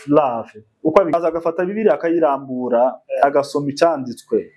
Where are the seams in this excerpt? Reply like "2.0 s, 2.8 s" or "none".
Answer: 1.1 s